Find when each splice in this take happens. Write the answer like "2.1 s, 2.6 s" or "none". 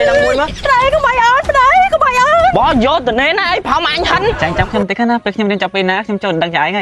4.4 s